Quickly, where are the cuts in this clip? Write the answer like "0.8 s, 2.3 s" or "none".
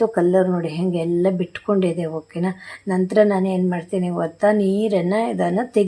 none